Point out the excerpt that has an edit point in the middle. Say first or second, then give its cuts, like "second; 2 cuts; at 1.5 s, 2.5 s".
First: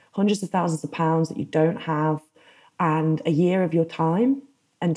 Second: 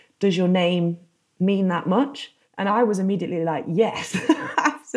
second; 1 cut; at 2.6 s